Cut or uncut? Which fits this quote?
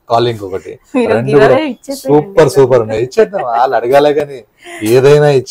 uncut